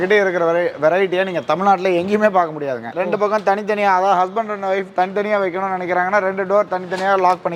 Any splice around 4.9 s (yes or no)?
no